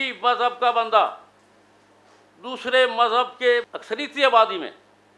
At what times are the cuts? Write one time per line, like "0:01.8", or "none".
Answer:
0:03.8